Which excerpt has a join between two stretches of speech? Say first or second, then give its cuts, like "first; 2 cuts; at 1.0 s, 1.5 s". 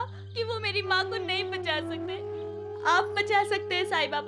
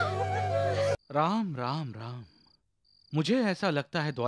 second; 1 cut; at 1.0 s